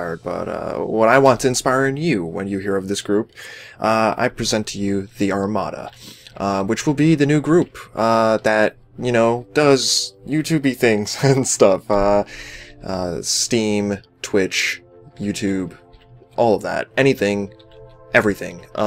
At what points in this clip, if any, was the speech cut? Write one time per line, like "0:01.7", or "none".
0:06.0